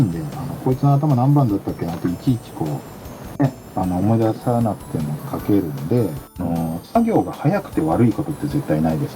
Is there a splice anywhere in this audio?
yes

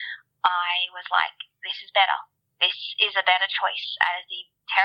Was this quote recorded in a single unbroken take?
yes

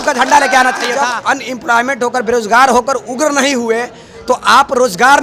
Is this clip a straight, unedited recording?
no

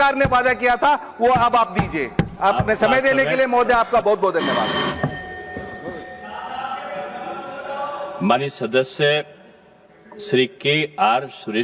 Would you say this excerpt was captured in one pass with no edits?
yes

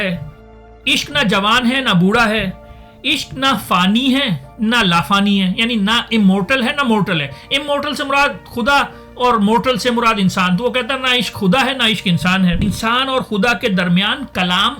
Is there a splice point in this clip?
yes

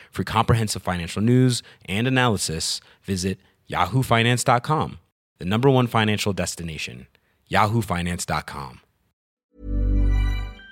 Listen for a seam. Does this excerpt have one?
yes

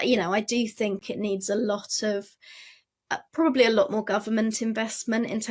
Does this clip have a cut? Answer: yes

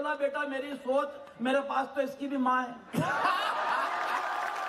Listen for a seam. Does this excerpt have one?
no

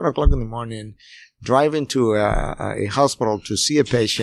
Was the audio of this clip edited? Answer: no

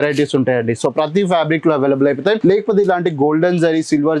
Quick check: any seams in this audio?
yes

